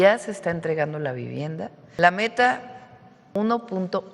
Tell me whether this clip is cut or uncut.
cut